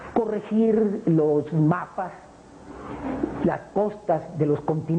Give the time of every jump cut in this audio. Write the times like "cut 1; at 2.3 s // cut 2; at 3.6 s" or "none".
cut 1; at 1.0 s